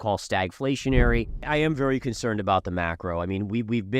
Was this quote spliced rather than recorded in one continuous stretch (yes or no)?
yes